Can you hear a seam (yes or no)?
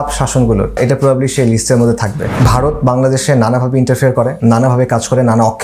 yes